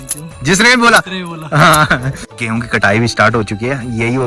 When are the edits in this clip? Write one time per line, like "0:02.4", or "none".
0:02.3